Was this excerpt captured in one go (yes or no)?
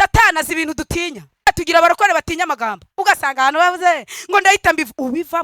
no